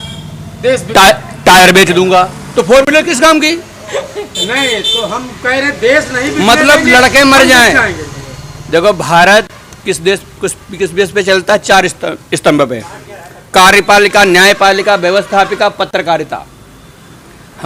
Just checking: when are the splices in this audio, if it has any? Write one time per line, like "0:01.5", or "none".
none